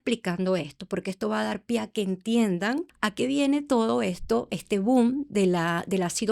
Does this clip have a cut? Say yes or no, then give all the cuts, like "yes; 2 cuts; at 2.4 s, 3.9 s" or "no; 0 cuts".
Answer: yes; 1 cut; at 3.0 s